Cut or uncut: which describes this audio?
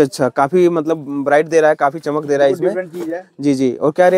uncut